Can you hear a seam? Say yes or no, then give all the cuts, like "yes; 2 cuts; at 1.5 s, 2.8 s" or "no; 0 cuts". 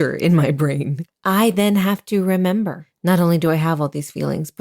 yes; 2 cuts; at 0.9 s, 2.9 s